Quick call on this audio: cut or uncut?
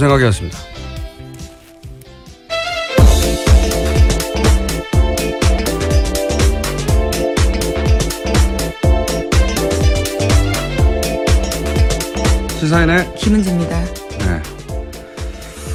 uncut